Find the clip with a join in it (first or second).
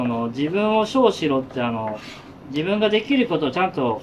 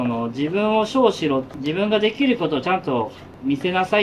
second